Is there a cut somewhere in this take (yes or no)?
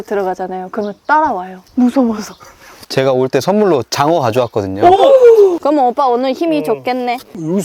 yes